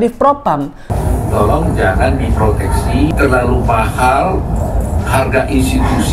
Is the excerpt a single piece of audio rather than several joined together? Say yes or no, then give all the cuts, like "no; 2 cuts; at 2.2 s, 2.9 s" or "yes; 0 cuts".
no; 2 cuts; at 0.9 s, 3.1 s